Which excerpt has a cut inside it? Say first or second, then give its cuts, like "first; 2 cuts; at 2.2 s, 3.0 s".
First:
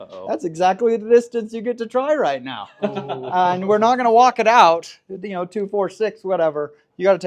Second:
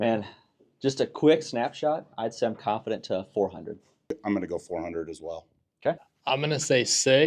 second; 2 cuts; at 4.2 s, 6.1 s